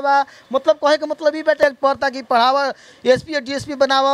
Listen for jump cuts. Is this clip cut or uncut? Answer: cut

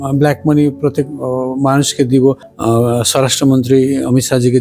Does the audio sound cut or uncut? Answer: cut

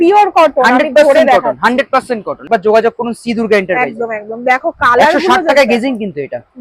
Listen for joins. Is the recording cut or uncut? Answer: cut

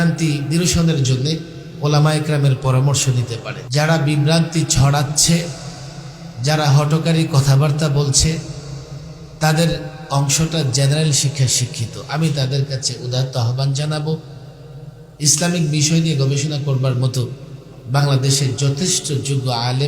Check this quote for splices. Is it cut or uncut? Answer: cut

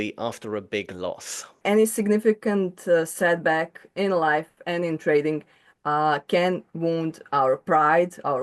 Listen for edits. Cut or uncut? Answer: cut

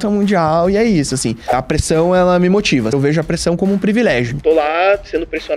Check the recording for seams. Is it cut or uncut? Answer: cut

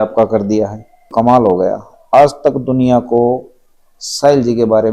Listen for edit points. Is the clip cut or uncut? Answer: cut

